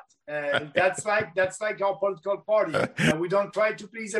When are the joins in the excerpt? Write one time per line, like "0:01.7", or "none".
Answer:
0:03.1